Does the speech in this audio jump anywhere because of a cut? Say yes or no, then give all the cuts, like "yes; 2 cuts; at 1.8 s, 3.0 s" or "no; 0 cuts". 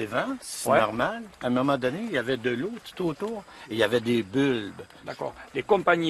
yes; 1 cut; at 4.9 s